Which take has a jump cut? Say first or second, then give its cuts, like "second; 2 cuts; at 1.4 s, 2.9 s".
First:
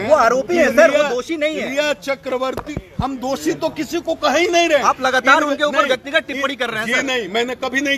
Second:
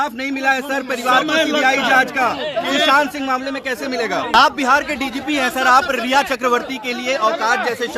second; 1 cut; at 4.3 s